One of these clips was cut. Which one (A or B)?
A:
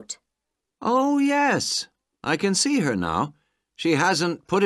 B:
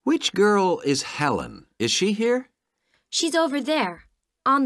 B